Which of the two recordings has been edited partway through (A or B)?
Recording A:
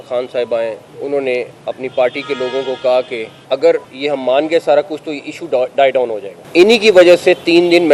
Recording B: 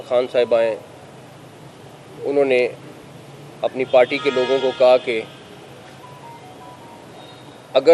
A